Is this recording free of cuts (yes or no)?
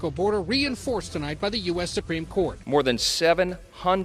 yes